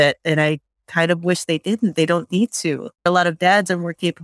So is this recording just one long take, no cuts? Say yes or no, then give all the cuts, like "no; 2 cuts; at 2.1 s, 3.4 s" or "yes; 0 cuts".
no; 1 cut; at 3.1 s